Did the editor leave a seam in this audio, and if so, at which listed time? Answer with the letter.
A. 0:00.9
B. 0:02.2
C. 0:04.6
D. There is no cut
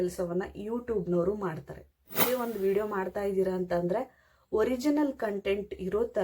B